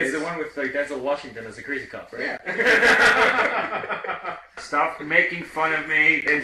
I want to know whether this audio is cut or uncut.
uncut